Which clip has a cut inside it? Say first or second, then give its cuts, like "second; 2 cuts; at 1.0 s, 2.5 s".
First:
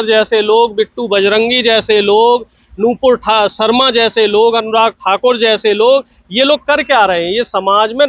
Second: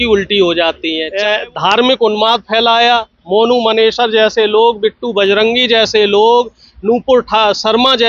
second; 1 cut; at 1.0 s